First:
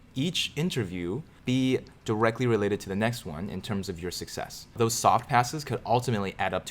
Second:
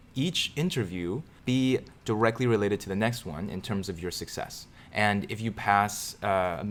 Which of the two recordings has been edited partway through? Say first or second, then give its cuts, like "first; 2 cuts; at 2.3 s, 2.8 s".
first; 1 cut; at 4.8 s